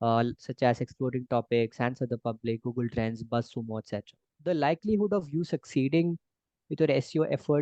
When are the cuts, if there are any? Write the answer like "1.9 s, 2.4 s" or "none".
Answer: 4.3 s